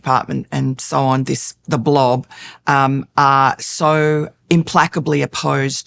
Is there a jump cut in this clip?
yes; 1 cut; at 4.3 s

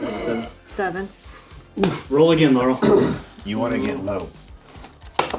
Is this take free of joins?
yes; 0 cuts

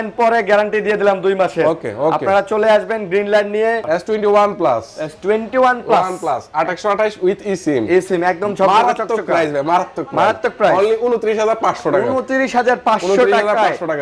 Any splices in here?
yes; 1 cut; at 3.8 s

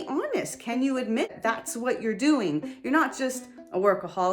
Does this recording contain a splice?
yes; 1 cut; at 1.3 s

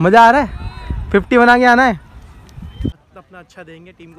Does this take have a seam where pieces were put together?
yes; 1 cut; at 3.0 s

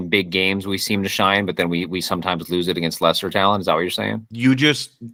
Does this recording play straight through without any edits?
yes; 0 cuts

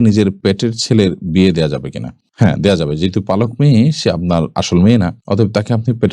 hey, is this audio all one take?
yes; 0 cuts

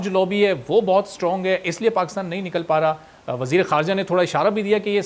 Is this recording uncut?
yes; 0 cuts

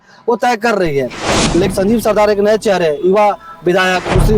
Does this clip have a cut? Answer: yes; 1 cut; at 1.7 s

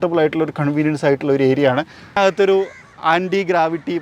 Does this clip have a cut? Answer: yes; 1 cut; at 2.2 s

